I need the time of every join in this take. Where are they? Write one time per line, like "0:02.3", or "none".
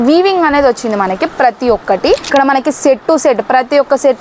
0:02.2